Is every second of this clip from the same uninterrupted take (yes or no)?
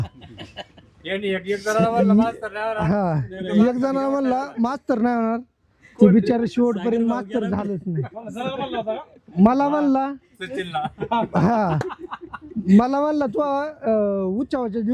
yes